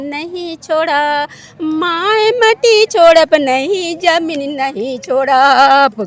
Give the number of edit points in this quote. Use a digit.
0